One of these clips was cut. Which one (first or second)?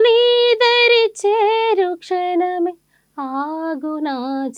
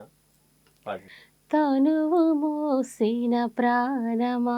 second